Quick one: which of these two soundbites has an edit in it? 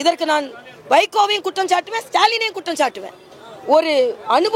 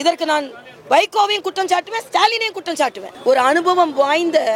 second; 1 cut; at 3.1 s

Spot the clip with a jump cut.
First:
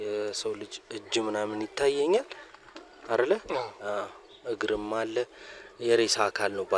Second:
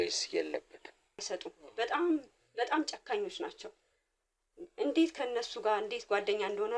second; 1 cut; at 1.2 s

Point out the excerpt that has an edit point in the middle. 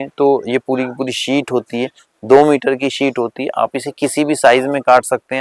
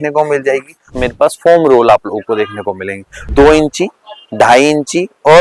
second; 2 cuts; at 0.9 s, 3.3 s

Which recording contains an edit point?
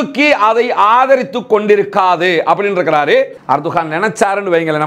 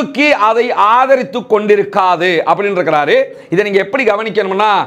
first; 1 cut; at 3.4 s

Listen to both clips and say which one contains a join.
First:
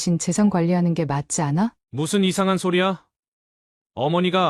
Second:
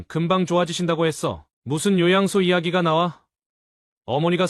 first; 1 cut; at 1.8 s

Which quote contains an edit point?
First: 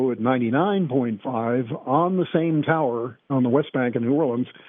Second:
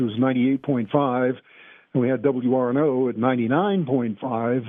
first; 1 cut; at 3.3 s

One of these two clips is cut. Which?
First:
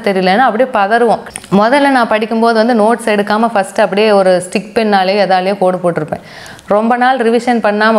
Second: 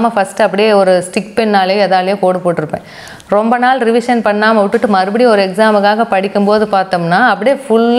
first; 1 cut; at 1.2 s

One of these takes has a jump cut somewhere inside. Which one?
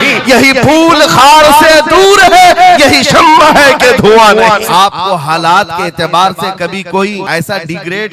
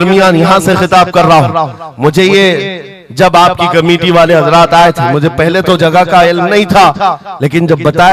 first; 2 cuts; at 4.6 s, 7.2 s

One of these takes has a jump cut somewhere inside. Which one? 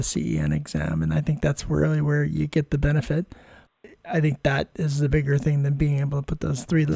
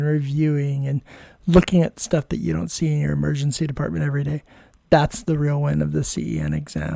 first; 1 cut; at 3.7 s

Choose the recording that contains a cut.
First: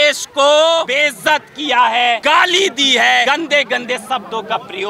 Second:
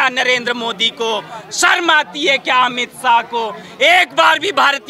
first; 3 cuts; at 0.9 s, 2.2 s, 3.2 s

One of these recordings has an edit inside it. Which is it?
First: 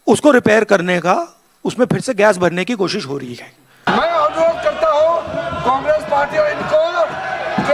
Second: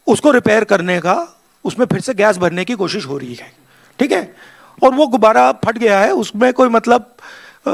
first; 1 cut; at 3.8 s

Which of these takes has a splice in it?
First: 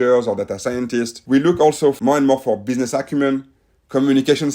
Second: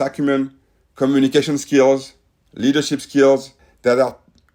first; 2 cuts; at 1.2 s, 2.0 s

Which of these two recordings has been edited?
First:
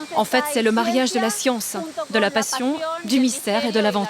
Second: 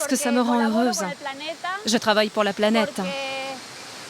second; 1 cut; at 3.1 s

